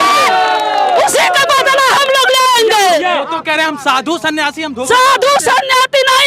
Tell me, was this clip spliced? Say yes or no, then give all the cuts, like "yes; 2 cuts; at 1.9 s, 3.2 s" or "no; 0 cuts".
yes; 1 cut; at 3.0 s